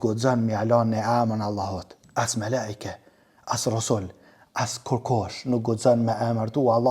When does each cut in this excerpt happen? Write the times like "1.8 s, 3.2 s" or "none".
2.0 s